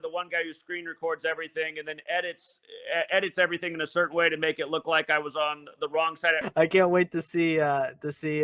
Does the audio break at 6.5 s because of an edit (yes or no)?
yes